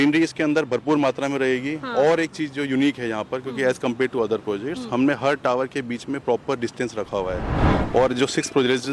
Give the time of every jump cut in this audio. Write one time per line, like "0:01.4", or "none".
0:07.6

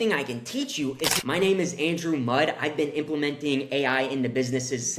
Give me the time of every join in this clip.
0:01.1

